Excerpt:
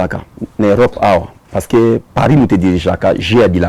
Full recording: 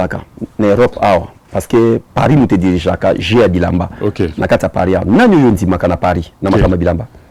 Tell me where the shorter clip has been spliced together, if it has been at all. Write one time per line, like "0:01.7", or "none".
none